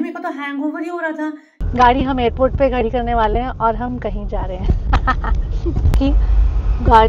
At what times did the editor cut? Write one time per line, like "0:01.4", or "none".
0:01.5
0:05.9

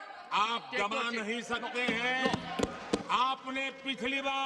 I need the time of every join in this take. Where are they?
0:03.0

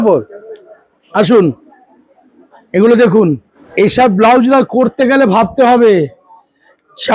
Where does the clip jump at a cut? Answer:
0:03.5

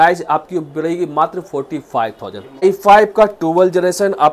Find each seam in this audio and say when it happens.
0:02.6

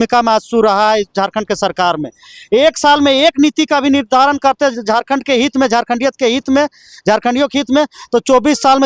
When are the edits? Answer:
none

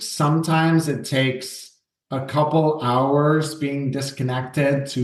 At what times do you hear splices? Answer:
none

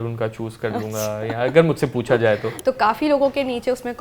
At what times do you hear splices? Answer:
0:02.5

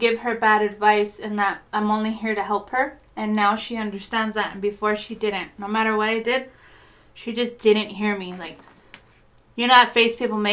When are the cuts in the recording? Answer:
none

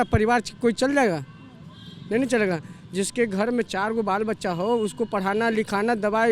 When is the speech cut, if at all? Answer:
none

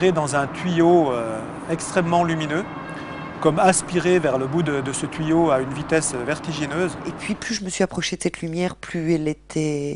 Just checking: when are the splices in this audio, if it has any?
0:07.2

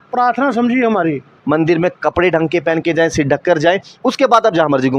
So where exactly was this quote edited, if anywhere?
0:01.3

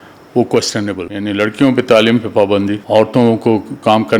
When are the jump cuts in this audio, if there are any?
0:01.1
0:02.8

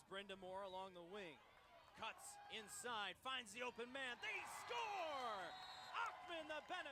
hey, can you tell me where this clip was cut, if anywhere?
none

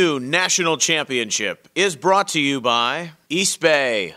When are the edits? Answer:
0:03.1

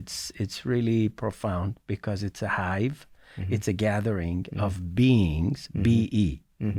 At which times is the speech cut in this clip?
none

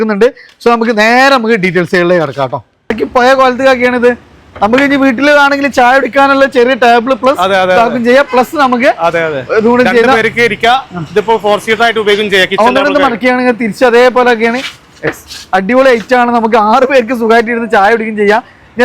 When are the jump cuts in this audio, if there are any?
0:02.9

